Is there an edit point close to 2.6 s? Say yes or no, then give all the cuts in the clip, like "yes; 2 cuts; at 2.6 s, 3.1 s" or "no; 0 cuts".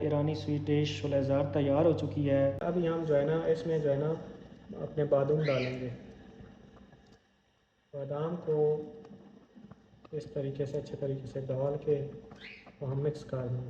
yes; 1 cut; at 2.6 s